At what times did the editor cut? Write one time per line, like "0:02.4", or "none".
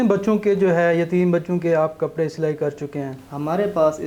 none

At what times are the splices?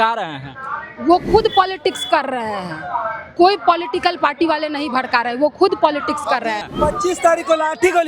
0:06.7

